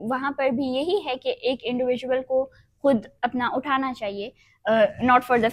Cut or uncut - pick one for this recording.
uncut